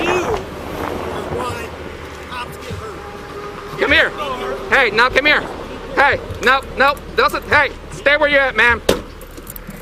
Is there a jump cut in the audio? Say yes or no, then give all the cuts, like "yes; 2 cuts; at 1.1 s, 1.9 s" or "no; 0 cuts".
no; 0 cuts